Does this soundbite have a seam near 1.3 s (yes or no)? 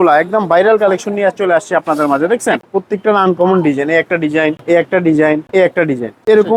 no